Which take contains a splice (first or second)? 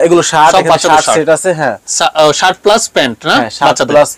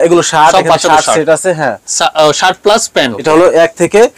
second